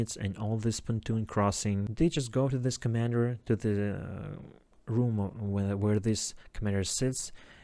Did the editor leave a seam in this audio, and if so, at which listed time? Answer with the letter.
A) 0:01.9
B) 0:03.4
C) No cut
A